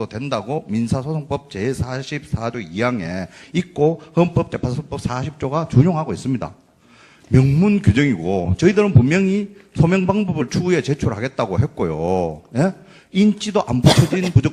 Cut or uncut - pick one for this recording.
cut